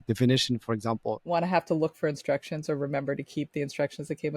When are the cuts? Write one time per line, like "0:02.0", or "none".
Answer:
0:01.2